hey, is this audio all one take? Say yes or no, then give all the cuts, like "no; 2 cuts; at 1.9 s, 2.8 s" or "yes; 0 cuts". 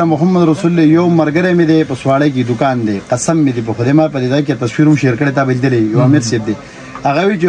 yes; 0 cuts